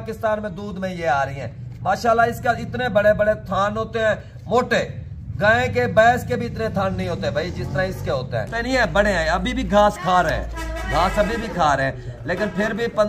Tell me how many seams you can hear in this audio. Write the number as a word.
one